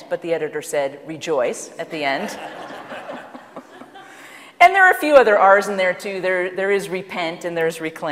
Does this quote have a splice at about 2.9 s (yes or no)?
yes